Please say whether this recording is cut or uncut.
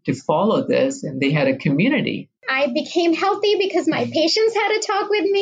cut